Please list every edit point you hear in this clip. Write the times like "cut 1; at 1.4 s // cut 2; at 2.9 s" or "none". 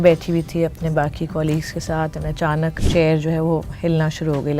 cut 1; at 2.8 s